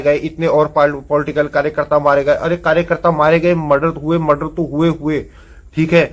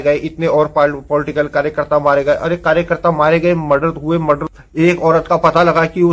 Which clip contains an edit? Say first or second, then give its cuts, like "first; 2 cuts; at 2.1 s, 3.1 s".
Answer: second; 1 cut; at 4.5 s